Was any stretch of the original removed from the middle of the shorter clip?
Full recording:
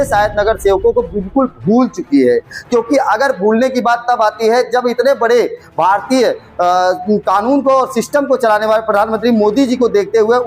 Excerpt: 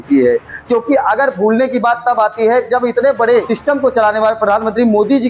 yes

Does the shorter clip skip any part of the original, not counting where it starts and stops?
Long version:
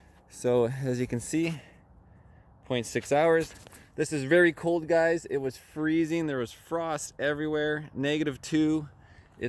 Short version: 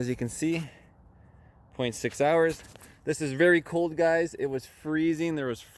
no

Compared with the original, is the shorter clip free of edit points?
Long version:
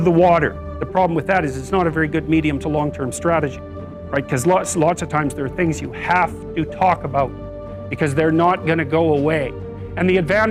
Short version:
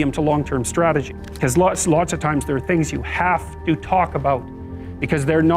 no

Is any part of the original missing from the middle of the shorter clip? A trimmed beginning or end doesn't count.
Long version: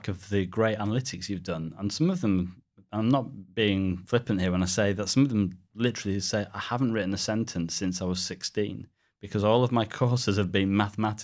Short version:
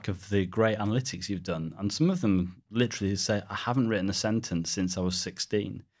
yes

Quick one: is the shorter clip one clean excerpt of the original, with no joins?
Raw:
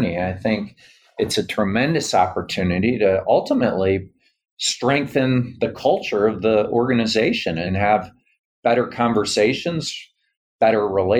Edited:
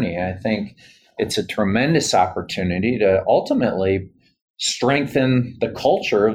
yes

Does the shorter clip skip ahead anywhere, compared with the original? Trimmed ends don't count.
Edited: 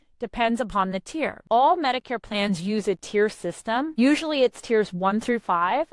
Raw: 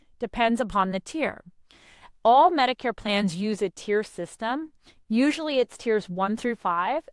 yes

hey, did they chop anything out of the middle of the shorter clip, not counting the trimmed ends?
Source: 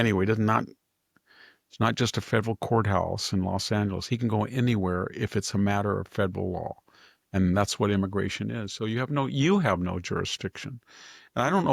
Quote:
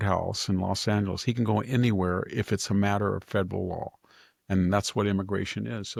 no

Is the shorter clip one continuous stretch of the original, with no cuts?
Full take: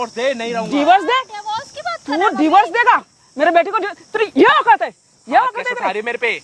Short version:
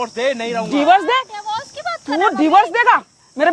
yes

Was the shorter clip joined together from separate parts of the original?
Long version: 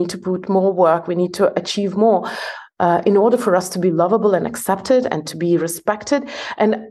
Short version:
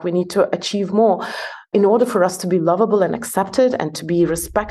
yes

